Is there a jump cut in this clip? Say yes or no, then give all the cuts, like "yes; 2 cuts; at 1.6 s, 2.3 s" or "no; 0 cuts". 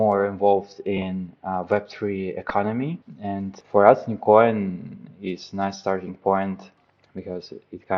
yes; 2 cuts; at 3.6 s, 6.9 s